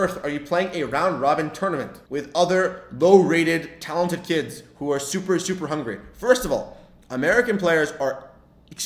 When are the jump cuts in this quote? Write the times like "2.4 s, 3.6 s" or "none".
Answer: 2.0 s